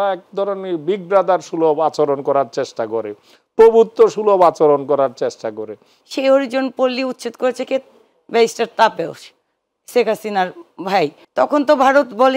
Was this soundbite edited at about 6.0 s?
yes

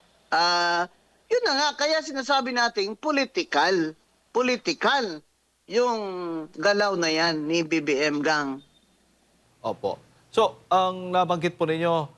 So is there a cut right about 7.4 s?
no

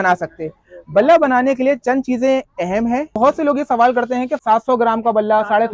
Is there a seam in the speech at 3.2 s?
yes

